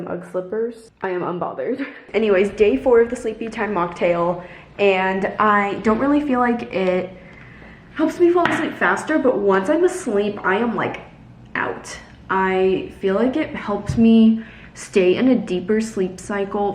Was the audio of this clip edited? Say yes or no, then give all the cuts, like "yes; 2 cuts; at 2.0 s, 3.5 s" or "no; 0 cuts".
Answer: no; 0 cuts